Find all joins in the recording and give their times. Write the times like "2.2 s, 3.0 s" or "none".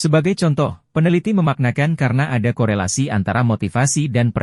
none

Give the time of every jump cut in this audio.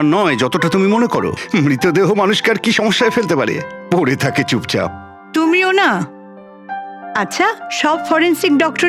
none

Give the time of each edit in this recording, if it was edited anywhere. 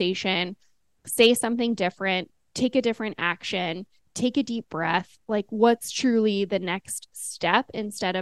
none

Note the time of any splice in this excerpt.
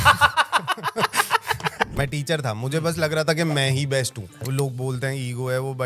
1.9 s, 4.2 s

